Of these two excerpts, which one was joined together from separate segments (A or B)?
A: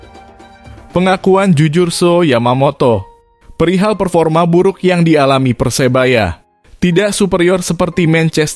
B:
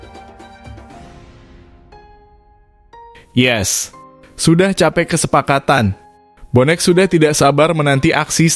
A